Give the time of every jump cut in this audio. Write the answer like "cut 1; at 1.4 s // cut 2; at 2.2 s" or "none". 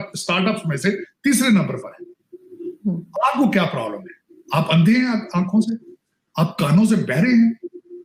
none